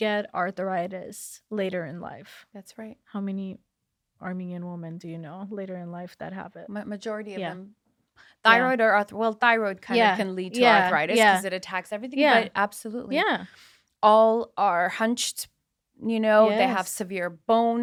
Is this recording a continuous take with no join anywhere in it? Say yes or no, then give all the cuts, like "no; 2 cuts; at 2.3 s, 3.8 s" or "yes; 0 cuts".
yes; 0 cuts